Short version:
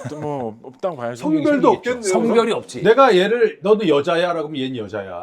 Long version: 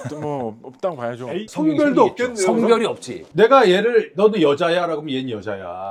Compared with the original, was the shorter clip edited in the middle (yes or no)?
yes